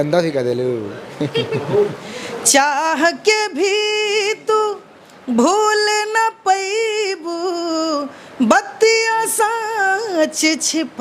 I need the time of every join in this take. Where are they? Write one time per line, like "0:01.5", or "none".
0:02.0